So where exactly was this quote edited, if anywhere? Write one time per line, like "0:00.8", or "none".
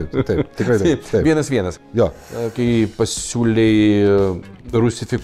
0:02.1